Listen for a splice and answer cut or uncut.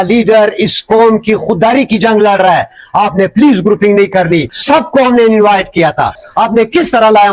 cut